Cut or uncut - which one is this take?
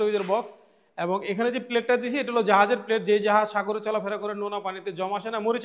uncut